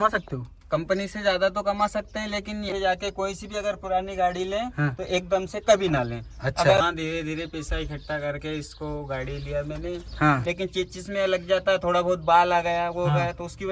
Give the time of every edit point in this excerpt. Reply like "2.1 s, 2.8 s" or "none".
2.7 s, 6.8 s, 10.4 s